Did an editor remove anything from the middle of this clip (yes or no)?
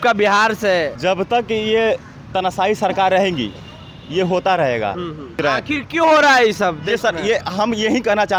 yes